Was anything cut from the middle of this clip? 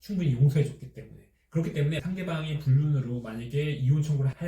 yes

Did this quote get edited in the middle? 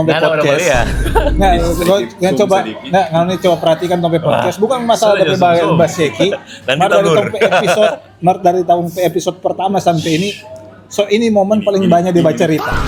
no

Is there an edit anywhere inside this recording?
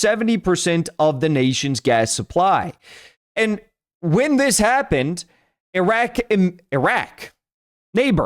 no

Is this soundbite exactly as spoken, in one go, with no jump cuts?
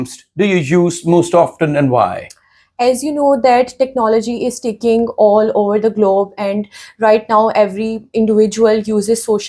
yes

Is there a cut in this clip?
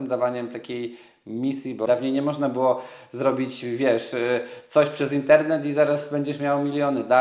yes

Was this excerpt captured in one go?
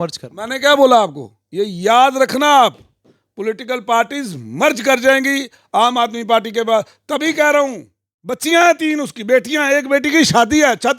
no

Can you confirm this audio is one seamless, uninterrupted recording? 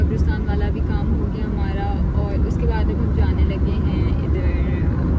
yes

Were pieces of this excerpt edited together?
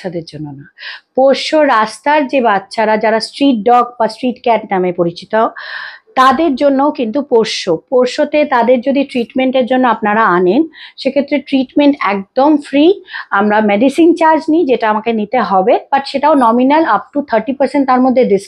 no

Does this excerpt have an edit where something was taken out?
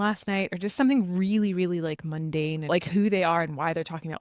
yes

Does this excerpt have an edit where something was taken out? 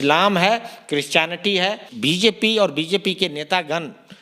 yes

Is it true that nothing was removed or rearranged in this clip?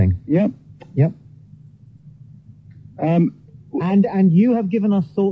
no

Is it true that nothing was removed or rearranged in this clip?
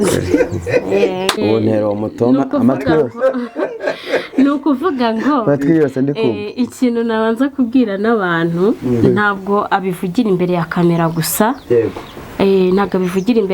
no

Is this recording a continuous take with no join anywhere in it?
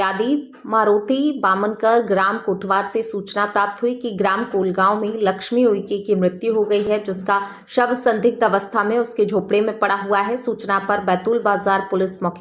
yes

